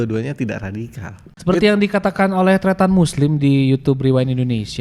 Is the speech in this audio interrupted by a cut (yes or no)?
yes